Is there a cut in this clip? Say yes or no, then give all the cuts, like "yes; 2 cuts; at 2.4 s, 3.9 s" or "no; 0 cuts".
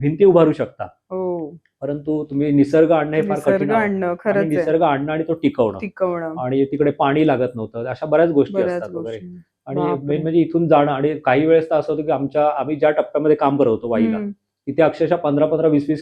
no; 0 cuts